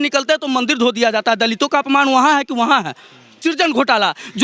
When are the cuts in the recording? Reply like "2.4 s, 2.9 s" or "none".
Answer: 3.3 s